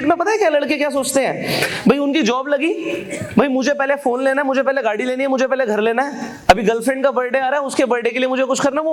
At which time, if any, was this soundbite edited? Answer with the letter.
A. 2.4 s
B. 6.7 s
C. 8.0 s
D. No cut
D